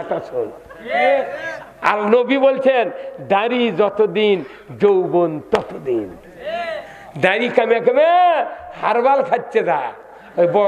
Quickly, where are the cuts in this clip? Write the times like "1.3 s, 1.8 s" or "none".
none